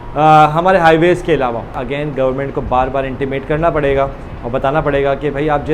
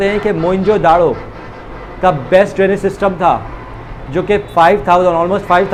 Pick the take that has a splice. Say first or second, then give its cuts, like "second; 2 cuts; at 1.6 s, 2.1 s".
first; 1 cut; at 1.8 s